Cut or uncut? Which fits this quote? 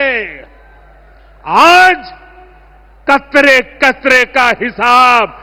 uncut